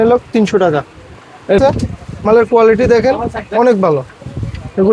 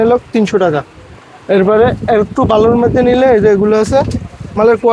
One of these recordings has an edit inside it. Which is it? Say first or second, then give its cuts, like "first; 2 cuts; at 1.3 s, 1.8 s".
first; 1 cut; at 1.6 s